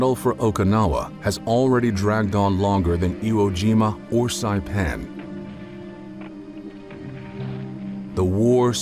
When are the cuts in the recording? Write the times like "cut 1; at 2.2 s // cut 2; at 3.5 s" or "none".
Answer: none